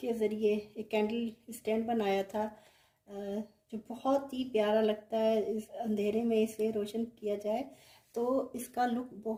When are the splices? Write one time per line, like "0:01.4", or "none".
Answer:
none

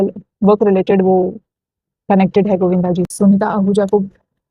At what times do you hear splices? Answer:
0:03.1

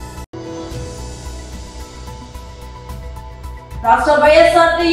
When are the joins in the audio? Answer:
0:03.7

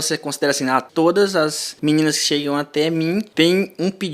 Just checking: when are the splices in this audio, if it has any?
0:00.9
0:01.7
0:03.3

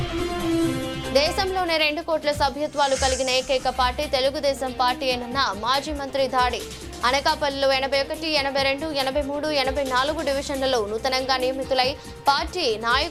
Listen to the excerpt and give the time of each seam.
none

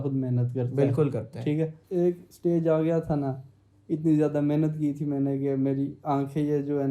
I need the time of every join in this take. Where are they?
0:01.8

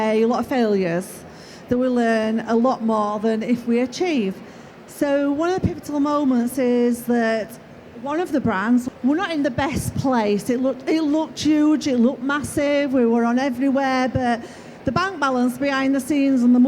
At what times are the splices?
0:08.8

